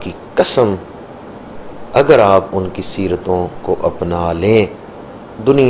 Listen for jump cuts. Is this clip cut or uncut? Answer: uncut